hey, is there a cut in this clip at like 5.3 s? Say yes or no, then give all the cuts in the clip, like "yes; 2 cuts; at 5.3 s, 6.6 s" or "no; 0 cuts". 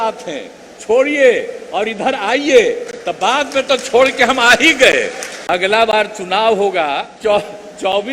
yes; 2 cuts; at 5.3 s, 7.1 s